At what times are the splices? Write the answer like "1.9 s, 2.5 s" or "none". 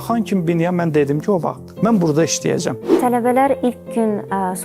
1.6 s, 2.9 s